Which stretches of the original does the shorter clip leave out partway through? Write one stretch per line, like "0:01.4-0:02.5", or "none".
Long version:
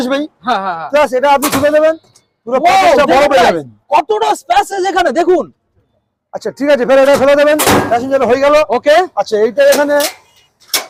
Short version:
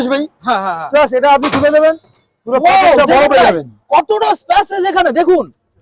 none